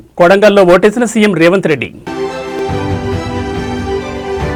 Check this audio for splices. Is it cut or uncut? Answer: uncut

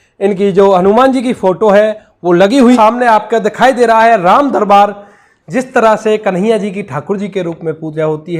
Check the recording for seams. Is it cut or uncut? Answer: cut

